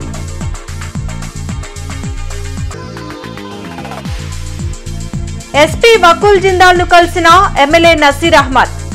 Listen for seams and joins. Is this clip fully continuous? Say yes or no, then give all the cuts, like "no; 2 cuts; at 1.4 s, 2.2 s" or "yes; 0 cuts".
no; 1 cut; at 5.0 s